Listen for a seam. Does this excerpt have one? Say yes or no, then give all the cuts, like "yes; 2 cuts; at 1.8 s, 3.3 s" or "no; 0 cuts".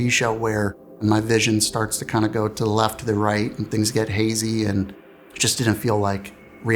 yes; 1 cut; at 1.0 s